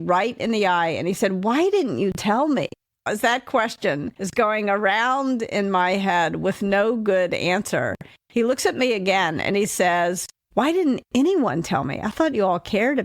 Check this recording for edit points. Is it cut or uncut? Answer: cut